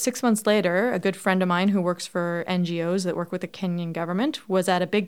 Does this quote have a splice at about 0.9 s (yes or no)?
no